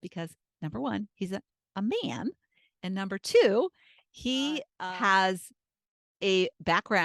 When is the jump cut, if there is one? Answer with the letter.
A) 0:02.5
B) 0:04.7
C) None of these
B